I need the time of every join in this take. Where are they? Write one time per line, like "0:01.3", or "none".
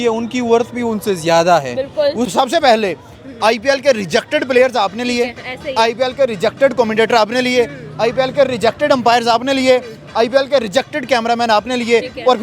0:02.3